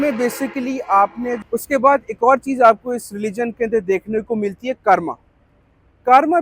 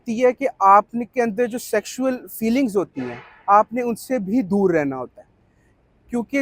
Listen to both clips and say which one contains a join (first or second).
first